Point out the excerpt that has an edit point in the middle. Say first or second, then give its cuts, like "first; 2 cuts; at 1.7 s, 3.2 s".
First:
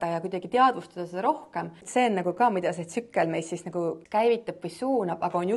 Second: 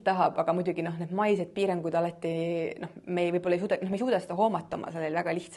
first; 2 cuts; at 1.8 s, 4.0 s